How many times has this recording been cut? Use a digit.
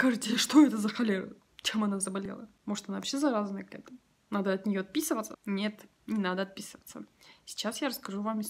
2